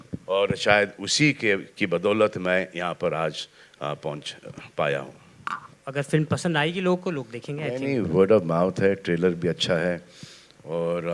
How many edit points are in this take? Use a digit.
1